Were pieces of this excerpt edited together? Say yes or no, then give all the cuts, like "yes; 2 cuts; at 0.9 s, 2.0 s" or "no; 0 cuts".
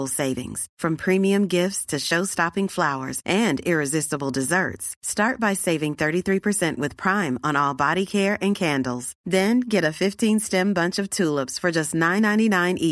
no; 0 cuts